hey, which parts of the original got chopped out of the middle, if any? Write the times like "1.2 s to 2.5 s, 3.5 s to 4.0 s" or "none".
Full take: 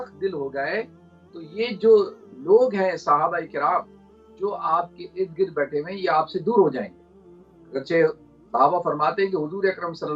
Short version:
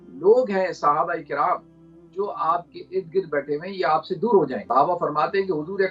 6.8 s to 8.4 s